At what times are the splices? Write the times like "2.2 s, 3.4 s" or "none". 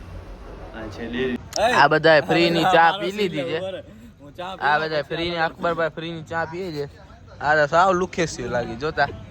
1.4 s